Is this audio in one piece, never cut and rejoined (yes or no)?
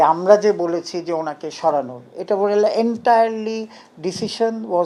yes